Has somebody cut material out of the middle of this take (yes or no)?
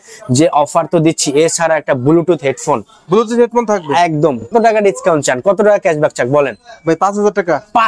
yes